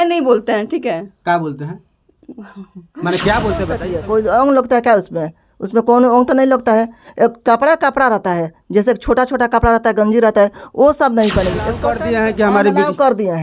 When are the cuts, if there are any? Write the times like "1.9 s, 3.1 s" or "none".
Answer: 3.9 s, 11.9 s